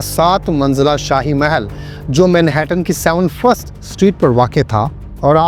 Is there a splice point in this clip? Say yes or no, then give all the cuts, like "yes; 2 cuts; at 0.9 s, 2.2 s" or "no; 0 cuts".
no; 0 cuts